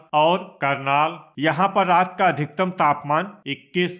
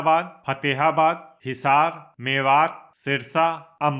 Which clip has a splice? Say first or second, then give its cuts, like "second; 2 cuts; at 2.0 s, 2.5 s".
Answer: second; 3 cuts; at 1.4 s, 2.1 s, 3.2 s